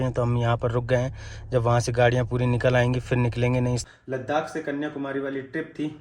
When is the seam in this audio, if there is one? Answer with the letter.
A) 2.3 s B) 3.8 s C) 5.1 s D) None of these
B